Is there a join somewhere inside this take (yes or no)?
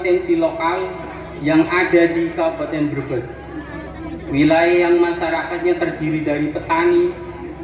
no